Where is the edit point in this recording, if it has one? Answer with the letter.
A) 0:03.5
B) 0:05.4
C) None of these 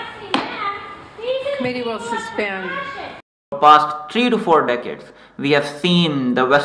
A